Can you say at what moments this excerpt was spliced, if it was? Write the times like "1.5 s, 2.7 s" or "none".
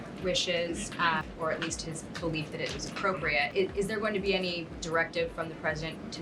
1.3 s, 3.5 s, 4.7 s